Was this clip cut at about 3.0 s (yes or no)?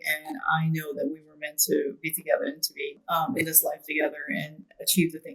yes